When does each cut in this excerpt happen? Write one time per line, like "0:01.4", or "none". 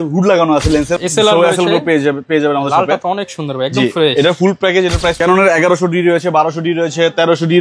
0:00.9
0:05.2